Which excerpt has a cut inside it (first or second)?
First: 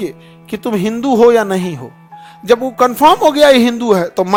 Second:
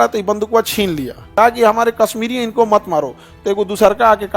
second